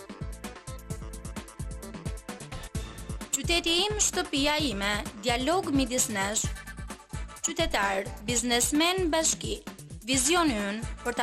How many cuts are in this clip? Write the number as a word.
one